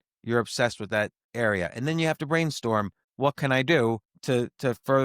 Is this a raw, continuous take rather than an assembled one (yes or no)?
no